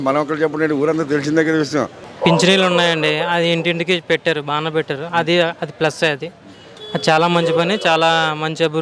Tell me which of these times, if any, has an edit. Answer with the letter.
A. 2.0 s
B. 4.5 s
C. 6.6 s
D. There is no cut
A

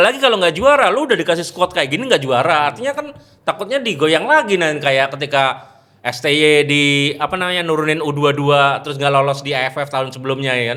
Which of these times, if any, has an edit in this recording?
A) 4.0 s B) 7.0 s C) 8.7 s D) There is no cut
D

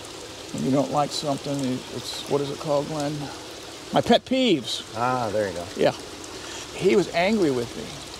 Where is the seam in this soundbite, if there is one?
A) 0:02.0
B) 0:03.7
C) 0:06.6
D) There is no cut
C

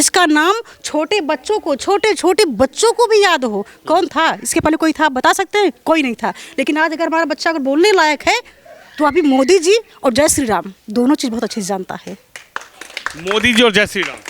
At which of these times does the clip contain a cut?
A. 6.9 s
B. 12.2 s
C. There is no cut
C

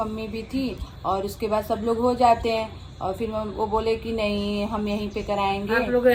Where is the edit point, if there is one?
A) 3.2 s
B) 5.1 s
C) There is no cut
C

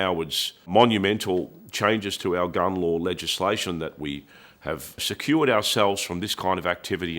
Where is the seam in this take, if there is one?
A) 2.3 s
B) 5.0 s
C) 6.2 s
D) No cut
B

